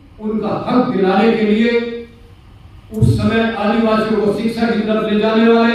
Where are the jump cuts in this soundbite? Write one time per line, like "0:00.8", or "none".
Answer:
none